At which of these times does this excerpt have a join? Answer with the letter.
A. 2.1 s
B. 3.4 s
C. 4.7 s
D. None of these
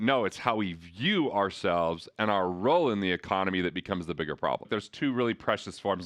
C